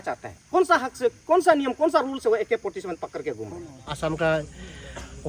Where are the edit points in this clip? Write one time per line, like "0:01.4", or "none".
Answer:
0:03.9

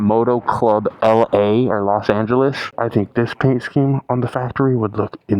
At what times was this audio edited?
0:02.7

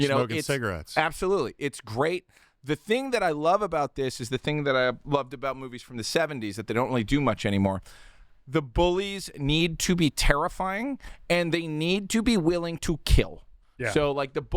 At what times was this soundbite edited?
none

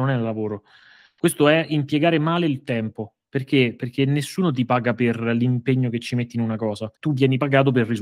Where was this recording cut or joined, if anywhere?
0:06.9

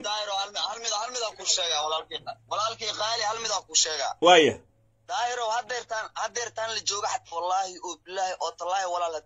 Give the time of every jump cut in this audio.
none

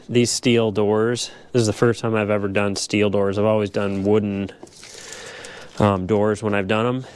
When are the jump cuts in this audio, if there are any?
none

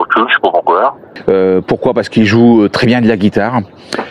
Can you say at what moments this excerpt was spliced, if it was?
0:01.1

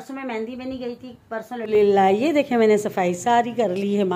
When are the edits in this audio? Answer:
0:01.7

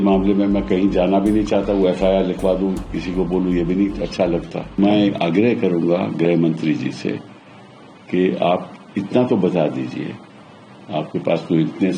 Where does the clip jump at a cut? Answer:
0:04.8

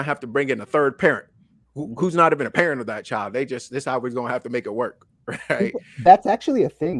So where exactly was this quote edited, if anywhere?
none

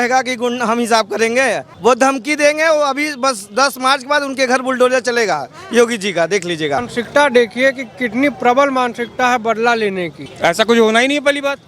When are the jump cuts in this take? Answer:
0:01.7
0:06.9
0:10.3

